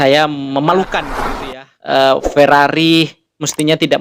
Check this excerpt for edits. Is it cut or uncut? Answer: cut